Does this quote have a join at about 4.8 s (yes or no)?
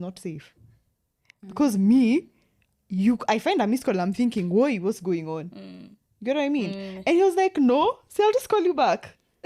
no